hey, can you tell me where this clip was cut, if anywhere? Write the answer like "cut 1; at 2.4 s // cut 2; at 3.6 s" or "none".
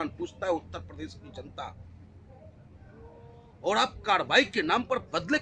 none